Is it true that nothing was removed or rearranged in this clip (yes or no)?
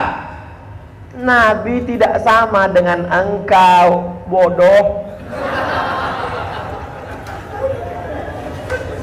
yes